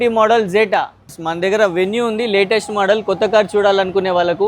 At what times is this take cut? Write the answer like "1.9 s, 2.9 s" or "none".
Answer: 1.2 s